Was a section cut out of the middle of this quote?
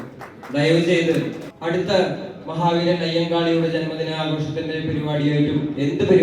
yes; 1 cut; at 1.5 s

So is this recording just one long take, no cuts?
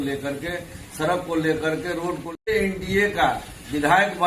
no; 1 cut; at 2.5 s

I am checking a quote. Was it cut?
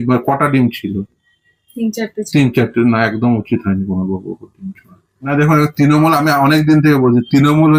no; 0 cuts

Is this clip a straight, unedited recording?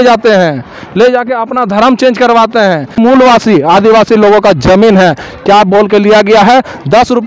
no; 1 cut; at 3.0 s

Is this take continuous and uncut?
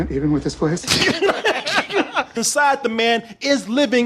no; 1 cut; at 2.4 s

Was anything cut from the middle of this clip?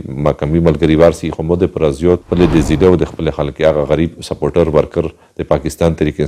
no; 0 cuts

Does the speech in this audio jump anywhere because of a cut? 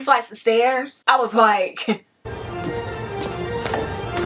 yes; 1 cut; at 0.9 s

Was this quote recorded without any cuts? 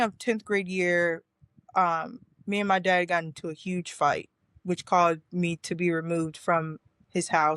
yes; 0 cuts

